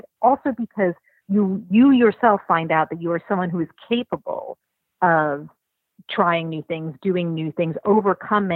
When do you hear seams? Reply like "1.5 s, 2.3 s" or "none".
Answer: 1.2 s